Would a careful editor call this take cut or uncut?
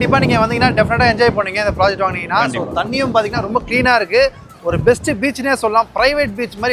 uncut